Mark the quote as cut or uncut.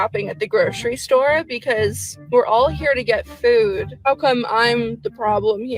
uncut